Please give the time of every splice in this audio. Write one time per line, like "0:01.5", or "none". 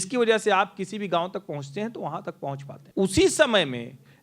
0:02.7

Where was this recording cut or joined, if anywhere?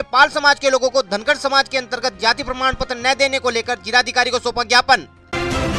none

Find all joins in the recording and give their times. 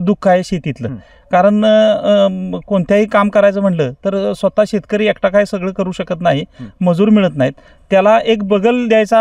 none

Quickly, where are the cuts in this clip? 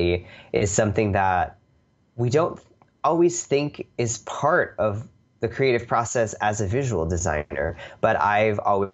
none

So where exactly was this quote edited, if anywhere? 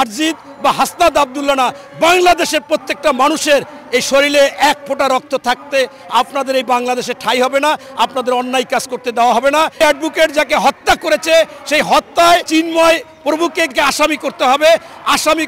0:09.8
0:12.5
0:13.8

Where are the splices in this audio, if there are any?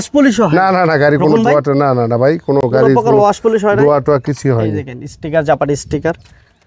none

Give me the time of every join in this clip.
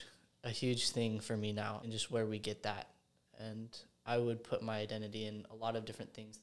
0:01.8

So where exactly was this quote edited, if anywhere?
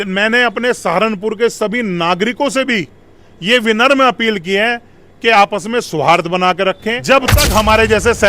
0:07.0

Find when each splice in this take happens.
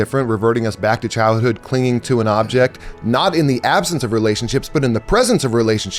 none

